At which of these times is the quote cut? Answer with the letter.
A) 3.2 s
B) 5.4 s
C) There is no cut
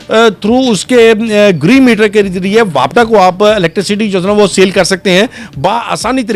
C